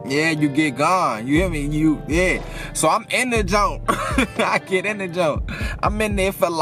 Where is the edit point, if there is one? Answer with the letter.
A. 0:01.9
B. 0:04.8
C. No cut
C